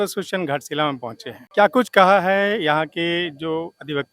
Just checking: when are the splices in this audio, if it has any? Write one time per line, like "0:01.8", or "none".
0:01.4